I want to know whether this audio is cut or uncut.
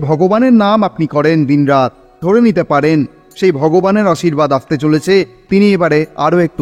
cut